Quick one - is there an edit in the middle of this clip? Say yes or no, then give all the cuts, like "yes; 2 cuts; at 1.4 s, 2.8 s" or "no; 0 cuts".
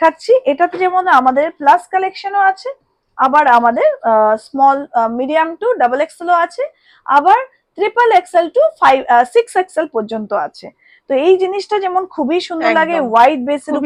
no; 0 cuts